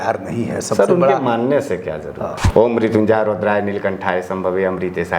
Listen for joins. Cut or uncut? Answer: cut